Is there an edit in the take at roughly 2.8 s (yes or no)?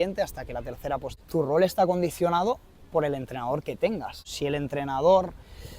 no